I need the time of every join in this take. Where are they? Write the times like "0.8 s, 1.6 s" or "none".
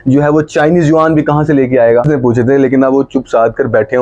2.1 s